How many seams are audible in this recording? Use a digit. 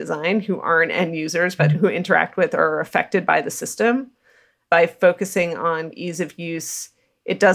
3